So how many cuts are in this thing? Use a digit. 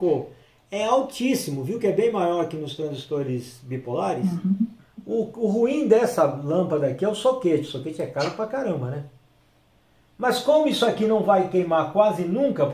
1